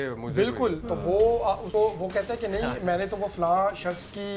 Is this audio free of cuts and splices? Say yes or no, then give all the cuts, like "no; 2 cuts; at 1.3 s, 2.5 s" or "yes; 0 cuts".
no; 1 cut; at 1.6 s